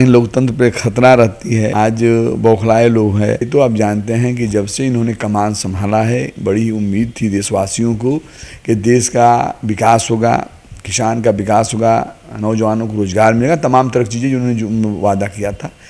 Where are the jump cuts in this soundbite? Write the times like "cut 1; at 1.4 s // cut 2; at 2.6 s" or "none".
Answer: cut 1; at 1.7 s // cut 2; at 3.5 s